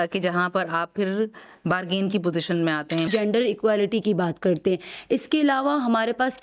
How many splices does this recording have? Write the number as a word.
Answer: one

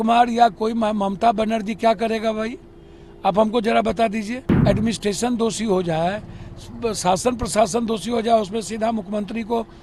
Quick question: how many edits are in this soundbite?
one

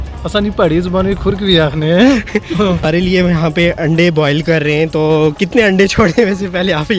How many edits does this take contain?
one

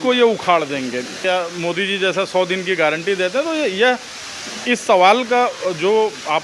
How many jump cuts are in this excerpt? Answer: one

